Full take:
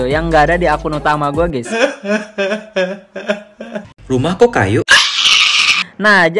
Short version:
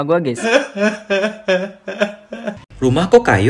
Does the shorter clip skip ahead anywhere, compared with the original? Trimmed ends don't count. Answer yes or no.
no